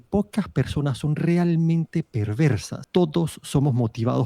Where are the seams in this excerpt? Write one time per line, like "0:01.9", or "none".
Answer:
0:02.7